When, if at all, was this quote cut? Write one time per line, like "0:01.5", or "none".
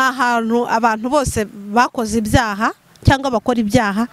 none